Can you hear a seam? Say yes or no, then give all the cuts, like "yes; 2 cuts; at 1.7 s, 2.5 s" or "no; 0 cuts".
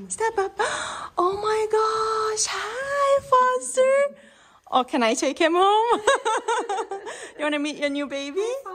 no; 0 cuts